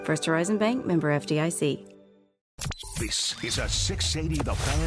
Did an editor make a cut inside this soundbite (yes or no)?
yes